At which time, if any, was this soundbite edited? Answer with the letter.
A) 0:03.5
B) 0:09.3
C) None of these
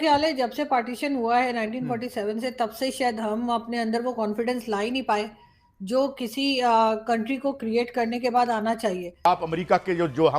B